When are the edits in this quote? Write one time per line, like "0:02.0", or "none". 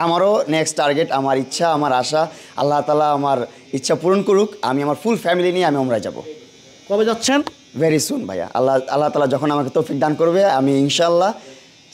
none